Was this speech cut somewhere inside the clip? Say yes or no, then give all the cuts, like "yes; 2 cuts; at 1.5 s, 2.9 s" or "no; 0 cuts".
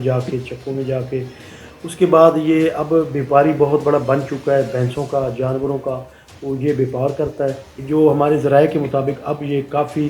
yes; 1 cut; at 7.7 s